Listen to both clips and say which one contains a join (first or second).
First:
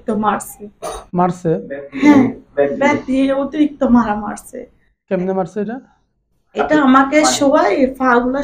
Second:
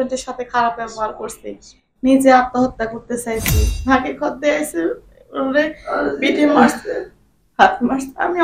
second